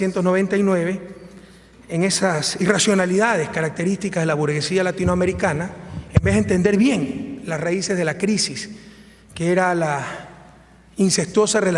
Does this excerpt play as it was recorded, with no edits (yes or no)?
yes